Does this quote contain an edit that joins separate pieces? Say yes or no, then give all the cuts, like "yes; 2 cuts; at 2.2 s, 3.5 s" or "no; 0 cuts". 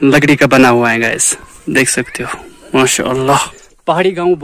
yes; 1 cut; at 3.5 s